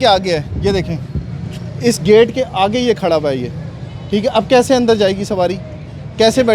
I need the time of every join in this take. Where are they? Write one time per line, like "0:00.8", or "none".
none

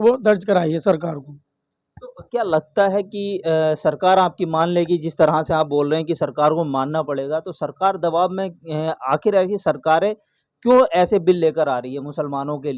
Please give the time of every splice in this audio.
none

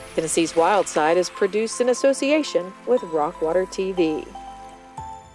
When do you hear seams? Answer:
0:04.3

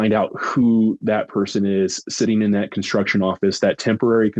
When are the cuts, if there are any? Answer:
none

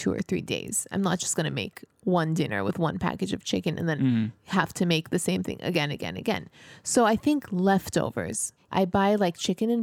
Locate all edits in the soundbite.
0:08.7

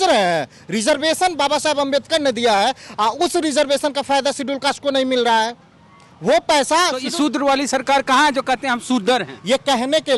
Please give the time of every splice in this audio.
none

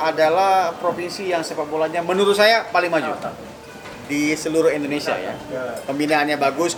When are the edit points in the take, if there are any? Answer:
none

